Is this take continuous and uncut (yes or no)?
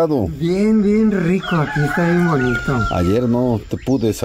yes